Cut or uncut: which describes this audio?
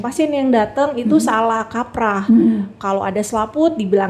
uncut